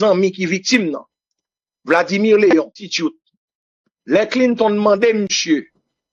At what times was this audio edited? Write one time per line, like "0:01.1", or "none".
0:02.8